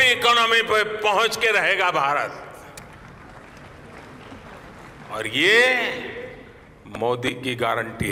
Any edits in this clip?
no; 0 cuts

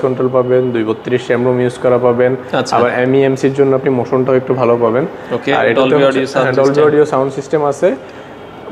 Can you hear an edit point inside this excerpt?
no; 0 cuts

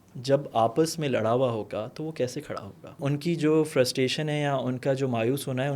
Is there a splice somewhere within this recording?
yes; 1 cut; at 3.0 s

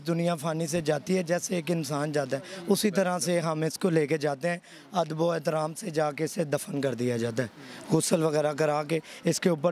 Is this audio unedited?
yes; 0 cuts

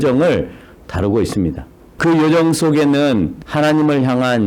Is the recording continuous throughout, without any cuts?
no; 2 cuts; at 1.9 s, 3.4 s

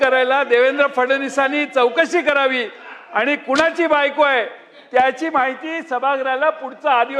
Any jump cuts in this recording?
no; 0 cuts

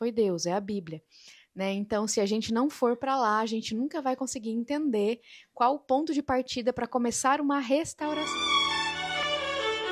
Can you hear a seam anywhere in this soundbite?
yes; 1 cut; at 8.2 s

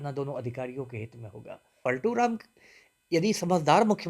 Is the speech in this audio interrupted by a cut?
yes; 1 cut; at 1.7 s

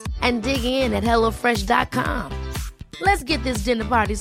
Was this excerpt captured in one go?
yes; 0 cuts

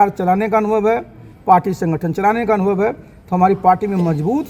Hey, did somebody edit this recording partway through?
no; 0 cuts

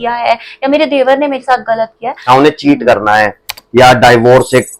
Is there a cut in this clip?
yes; 1 cut; at 2.3 s

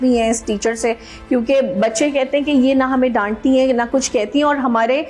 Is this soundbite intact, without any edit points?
yes; 0 cuts

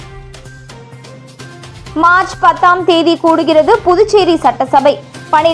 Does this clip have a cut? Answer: yes; 1 cut; at 1.7 s

